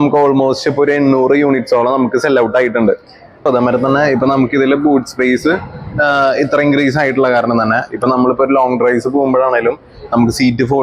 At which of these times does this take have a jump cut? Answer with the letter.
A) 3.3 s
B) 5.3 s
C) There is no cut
A